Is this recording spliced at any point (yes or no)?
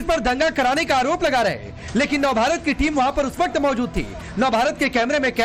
yes